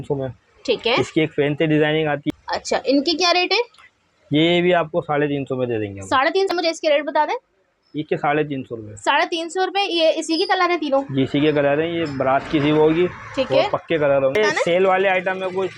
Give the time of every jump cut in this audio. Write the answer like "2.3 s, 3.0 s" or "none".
2.2 s, 6.5 s, 14.3 s